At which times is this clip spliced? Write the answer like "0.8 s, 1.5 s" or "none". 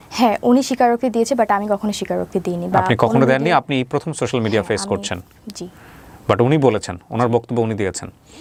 none